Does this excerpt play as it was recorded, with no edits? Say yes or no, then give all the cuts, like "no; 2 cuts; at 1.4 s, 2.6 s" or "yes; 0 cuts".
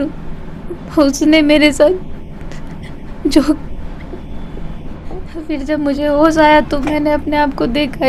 no; 1 cut; at 5.4 s